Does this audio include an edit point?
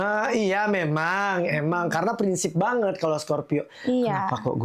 no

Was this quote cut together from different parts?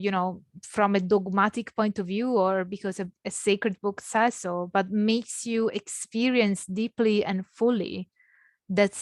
no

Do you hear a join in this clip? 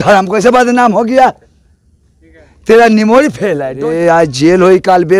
yes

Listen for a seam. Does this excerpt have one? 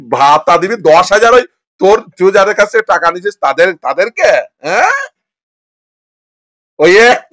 no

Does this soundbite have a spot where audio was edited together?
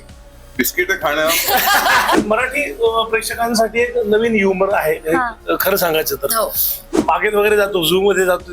yes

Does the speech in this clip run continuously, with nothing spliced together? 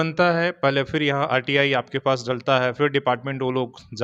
yes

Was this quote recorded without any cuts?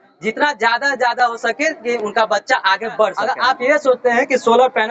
no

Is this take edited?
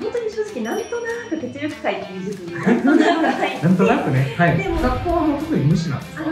yes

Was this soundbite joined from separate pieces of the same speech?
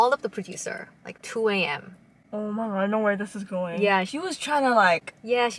yes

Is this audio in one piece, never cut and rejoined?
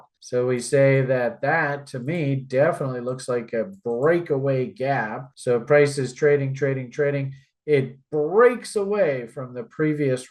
yes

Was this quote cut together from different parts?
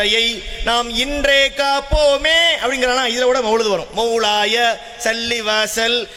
no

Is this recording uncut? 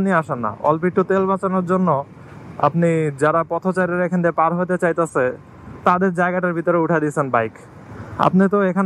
yes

